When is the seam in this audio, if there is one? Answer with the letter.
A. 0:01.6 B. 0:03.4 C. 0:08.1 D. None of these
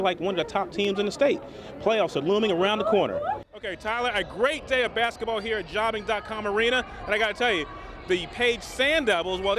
B